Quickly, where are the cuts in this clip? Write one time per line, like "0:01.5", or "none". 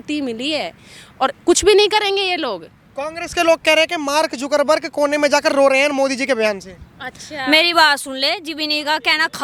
none